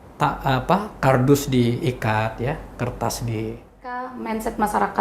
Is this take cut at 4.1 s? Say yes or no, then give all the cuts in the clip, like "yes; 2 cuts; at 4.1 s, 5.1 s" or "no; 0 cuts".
yes; 1 cut; at 4.1 s